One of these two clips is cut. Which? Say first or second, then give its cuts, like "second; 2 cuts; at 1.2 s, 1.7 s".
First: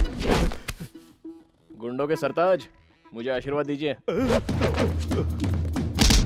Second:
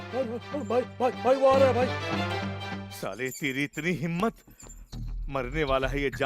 second; 2 cuts; at 2.0 s, 2.8 s